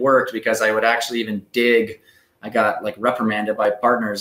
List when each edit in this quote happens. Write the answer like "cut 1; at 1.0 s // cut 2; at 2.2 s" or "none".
none